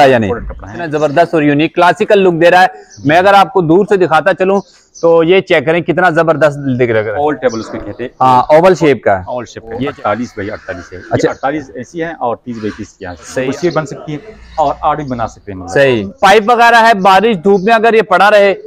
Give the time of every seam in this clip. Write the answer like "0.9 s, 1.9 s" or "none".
0.9 s, 7.1 s, 9.8 s, 13.3 s, 16.1 s